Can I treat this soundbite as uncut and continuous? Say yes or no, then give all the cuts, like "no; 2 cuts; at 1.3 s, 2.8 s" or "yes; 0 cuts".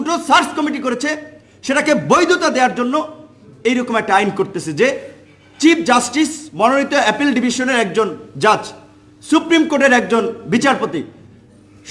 yes; 0 cuts